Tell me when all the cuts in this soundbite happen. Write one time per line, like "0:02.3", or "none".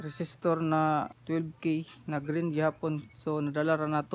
0:01.2